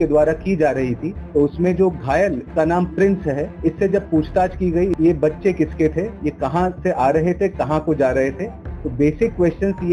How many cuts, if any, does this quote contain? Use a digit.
5